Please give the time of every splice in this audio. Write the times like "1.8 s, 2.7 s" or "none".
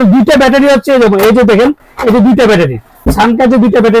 none